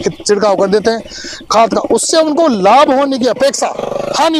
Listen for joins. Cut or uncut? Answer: uncut